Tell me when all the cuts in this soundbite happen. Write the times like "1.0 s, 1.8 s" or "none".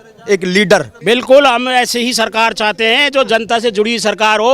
0.9 s